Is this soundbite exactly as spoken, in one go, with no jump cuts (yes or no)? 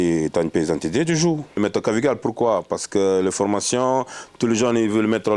no